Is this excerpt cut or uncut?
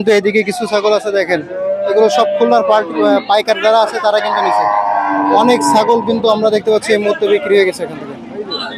uncut